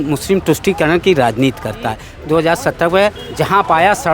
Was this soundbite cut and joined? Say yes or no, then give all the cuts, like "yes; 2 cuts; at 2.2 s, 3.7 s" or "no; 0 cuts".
yes; 1 cut; at 2.1 s